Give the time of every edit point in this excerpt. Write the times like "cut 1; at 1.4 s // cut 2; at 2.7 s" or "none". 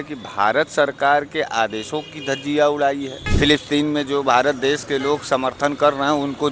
cut 1; at 3.2 s